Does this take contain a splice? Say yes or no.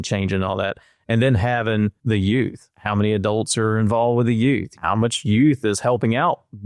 yes